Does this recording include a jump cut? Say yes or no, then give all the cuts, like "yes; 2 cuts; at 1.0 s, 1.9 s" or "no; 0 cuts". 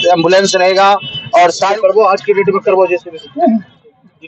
yes; 1 cut; at 1.7 s